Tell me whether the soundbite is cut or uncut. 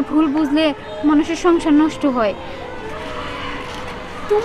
cut